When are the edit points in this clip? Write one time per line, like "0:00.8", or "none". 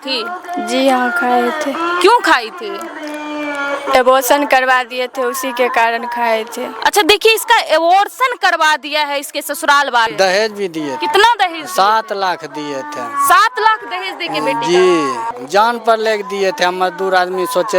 0:10.1
0:15.3